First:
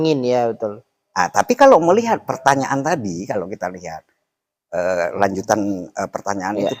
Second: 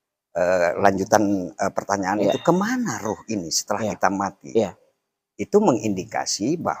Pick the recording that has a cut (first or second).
first